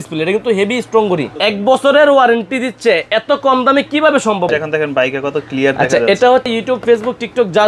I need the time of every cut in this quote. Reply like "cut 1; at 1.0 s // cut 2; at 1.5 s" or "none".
cut 1; at 1.3 s // cut 2; at 4.5 s // cut 3; at 6.5 s

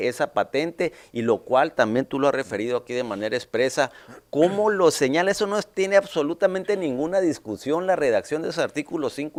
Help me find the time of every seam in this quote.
none

